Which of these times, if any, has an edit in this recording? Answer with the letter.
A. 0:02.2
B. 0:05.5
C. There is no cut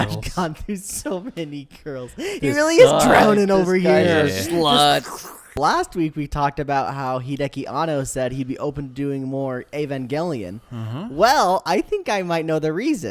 B